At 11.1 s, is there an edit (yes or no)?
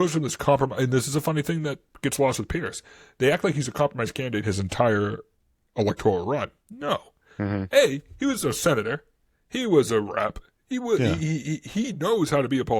no